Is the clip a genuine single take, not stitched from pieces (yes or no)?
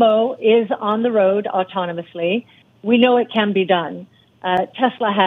yes